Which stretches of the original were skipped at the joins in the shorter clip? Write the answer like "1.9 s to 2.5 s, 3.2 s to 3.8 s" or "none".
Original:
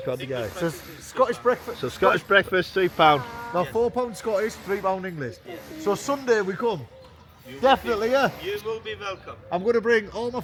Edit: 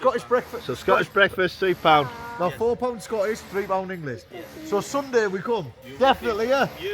6.9 s to 7.4 s